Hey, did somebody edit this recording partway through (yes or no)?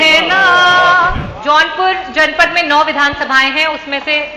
yes